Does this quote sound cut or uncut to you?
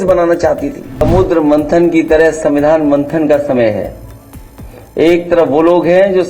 cut